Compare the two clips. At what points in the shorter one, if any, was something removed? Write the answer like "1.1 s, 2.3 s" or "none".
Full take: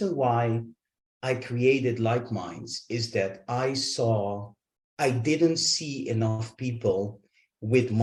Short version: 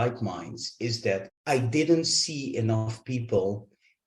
1.3 s